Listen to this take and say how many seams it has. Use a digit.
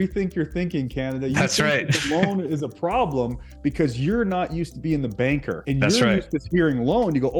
1